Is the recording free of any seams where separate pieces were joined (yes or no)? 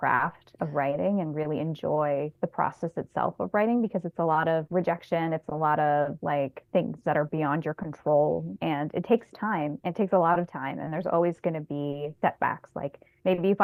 yes